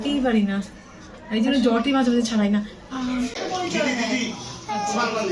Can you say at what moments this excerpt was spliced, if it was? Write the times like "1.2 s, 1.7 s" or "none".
3.4 s

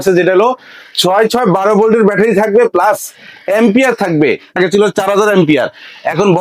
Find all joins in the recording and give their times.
4.5 s

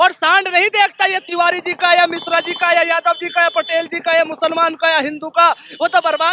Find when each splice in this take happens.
none

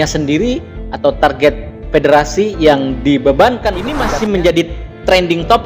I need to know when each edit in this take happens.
4.0 s

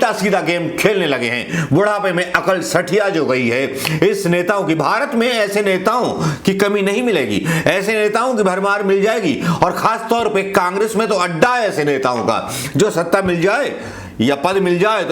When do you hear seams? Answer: none

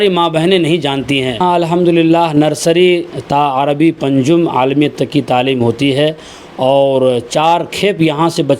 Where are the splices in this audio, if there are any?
1.4 s

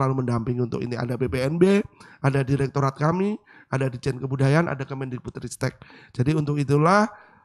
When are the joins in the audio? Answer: none

